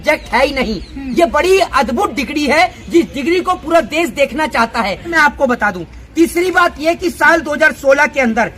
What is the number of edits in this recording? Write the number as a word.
one